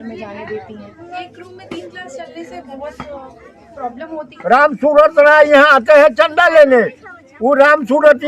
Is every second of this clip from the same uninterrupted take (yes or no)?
no